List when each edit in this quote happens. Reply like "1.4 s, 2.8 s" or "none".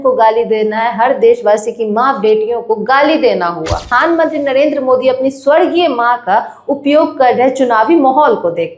3.9 s